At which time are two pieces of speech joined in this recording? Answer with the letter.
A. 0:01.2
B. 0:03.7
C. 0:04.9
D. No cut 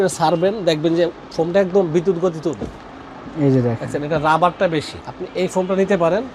D